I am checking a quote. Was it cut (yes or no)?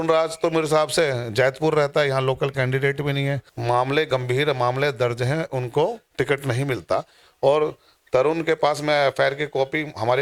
yes